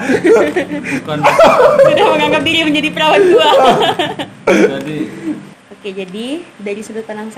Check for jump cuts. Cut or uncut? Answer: cut